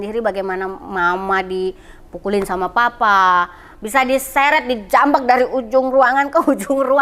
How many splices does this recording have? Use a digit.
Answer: 0